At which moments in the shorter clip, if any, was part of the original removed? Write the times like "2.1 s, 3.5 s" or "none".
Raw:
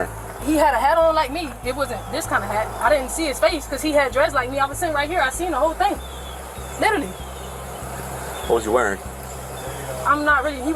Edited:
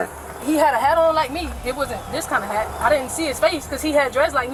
none